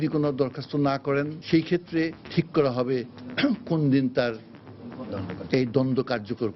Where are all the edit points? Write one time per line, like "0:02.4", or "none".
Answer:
0:01.4
0:02.2